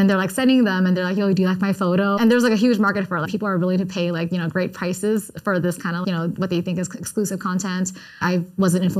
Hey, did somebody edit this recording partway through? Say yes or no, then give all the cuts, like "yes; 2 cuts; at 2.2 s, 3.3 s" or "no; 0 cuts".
yes; 4 cuts; at 2.2 s, 3.3 s, 6.0 s, 8.2 s